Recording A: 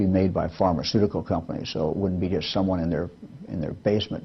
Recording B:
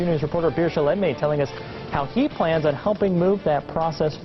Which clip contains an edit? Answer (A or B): B